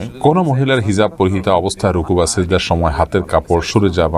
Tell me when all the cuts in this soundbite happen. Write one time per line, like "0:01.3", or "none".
none